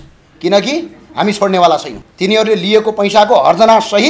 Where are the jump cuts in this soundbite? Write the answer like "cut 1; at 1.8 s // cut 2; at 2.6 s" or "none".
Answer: cut 1; at 2.0 s